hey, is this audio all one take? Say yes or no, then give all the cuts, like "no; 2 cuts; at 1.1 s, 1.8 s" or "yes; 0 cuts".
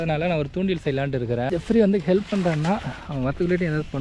no; 1 cut; at 1.5 s